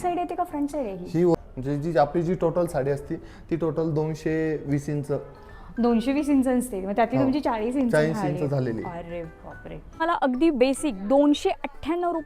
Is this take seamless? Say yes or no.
no